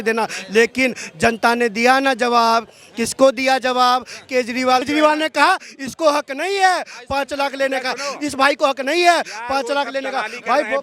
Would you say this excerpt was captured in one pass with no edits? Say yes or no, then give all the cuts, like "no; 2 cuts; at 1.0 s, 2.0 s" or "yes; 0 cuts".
no; 1 cut; at 4.9 s